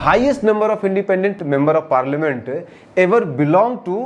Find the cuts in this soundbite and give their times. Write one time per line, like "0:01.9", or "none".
0:01.4